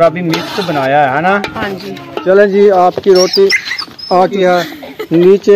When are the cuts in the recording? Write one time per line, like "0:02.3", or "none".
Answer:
0:02.2
0:04.4